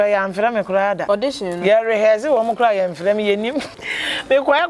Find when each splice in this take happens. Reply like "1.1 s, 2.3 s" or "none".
1.0 s, 3.8 s